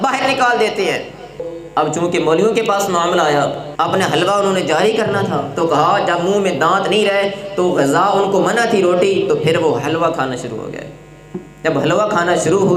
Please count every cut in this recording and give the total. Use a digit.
2